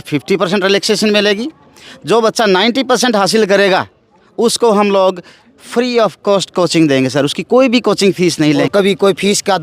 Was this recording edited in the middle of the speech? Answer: yes; 1 cut; at 8.6 s

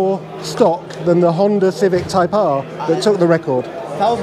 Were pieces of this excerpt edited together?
no; 0 cuts

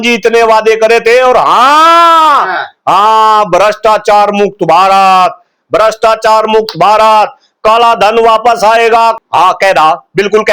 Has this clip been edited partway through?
yes; 1 cut; at 9.2 s

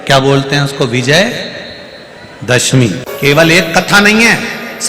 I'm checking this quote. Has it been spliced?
yes; 1 cut; at 2.8 s

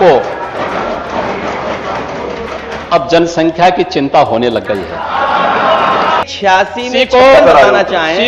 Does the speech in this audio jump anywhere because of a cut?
yes; 1 cut; at 6.2 s

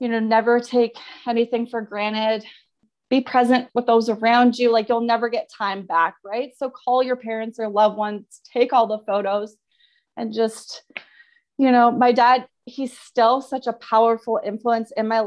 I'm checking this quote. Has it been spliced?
yes; 1 cut; at 2.9 s

